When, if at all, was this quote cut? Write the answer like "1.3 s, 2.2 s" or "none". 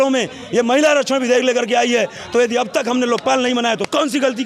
none